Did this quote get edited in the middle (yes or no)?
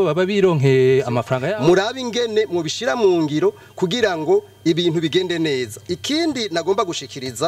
yes